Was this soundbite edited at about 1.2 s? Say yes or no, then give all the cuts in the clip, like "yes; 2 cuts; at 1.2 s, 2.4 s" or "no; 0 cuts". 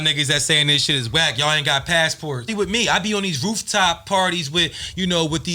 no; 1 cut; at 2.5 s